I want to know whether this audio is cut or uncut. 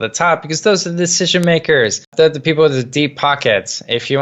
cut